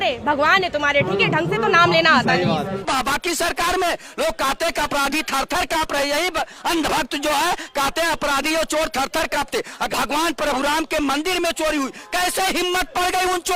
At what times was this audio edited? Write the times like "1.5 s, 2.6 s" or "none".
2.8 s, 9.9 s